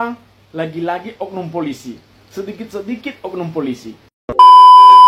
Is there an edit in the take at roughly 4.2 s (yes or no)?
yes